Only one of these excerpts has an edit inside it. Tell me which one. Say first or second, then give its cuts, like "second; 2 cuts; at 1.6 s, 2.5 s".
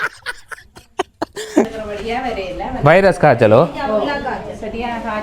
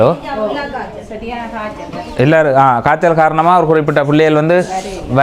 first; 1 cut; at 1.8 s